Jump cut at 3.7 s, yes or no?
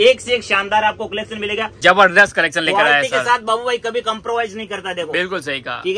no